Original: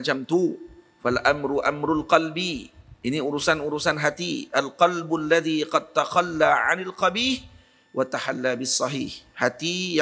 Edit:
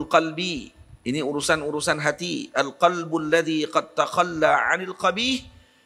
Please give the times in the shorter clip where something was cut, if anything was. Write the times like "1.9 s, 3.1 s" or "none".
none